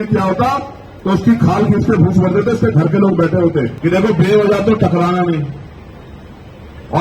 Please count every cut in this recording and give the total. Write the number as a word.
one